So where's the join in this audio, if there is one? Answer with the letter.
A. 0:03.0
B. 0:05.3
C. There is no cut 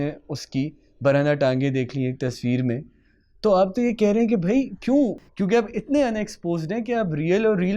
B